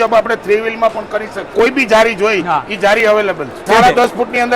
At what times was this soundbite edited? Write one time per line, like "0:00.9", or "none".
0:01.5
0:03.6